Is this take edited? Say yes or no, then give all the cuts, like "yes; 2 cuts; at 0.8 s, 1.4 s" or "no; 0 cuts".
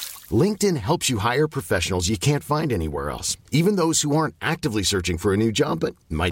no; 0 cuts